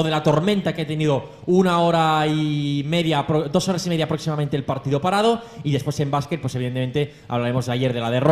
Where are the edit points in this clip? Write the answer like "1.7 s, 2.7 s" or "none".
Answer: none